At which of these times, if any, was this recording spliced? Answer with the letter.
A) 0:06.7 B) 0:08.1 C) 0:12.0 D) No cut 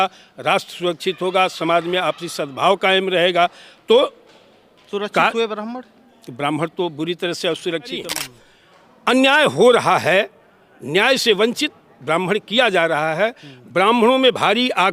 B